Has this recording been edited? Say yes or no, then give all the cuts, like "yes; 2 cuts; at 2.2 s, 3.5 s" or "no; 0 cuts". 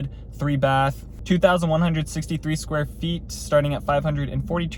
no; 0 cuts